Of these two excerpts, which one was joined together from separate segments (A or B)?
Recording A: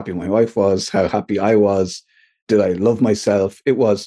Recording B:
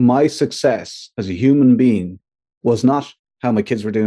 A